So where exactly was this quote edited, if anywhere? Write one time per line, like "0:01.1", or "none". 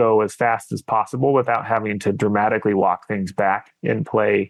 none